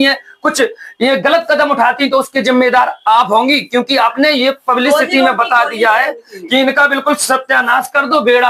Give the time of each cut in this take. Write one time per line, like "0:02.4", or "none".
none